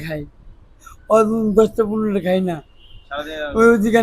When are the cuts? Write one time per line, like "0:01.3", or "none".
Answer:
none